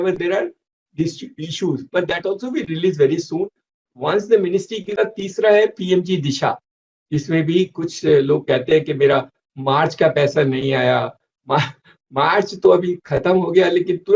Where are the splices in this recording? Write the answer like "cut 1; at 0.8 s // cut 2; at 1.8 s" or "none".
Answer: cut 1; at 5.0 s